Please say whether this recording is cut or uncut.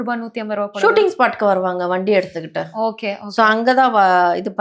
uncut